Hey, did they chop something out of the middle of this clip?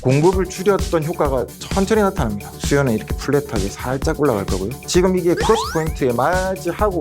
yes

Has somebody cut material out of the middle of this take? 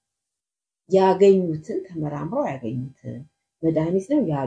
no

